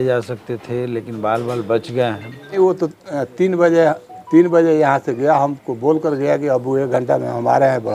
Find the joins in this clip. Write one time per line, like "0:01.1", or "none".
0:02.6